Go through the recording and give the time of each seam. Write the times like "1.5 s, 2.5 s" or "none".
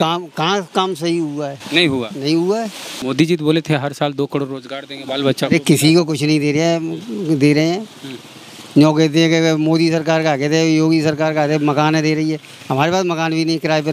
3.0 s